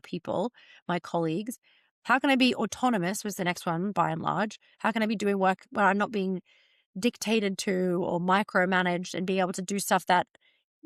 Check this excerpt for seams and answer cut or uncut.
uncut